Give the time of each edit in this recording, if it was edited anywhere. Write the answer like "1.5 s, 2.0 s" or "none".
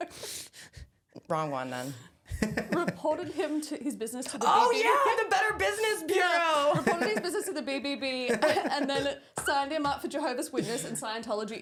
none

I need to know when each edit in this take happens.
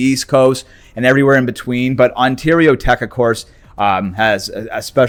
none

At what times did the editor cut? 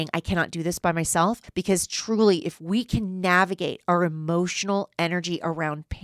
1.4 s

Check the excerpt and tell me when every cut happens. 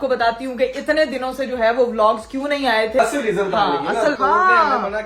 3.0 s, 4.1 s

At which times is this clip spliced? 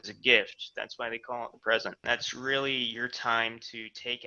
2.0 s

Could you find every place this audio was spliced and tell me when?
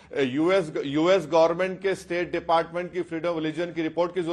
none

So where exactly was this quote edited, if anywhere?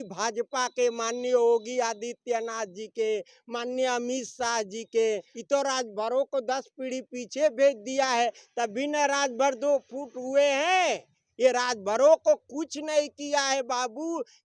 5.3 s

